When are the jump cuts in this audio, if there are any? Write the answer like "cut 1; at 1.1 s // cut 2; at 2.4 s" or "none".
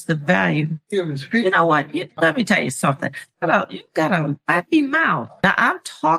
cut 1; at 5.3 s